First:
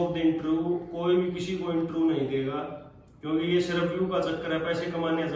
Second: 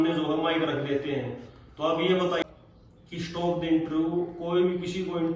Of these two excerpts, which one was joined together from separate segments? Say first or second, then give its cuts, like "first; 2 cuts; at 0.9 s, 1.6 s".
second; 1 cut; at 2.4 s